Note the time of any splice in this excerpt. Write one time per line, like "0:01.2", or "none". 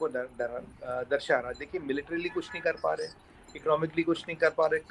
none